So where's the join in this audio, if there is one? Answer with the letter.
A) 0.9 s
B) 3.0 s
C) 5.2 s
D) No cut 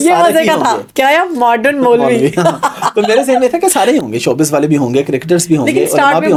D